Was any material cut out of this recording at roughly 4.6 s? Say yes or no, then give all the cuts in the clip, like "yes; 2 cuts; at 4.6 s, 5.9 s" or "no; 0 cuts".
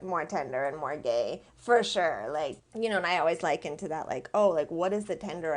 no; 1 cut; at 2.6 s